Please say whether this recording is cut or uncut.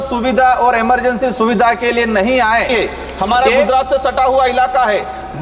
cut